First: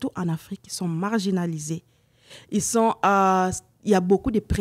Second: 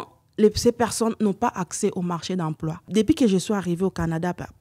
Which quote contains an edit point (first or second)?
second